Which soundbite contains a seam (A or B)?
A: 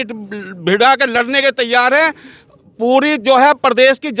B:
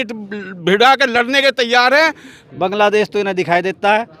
B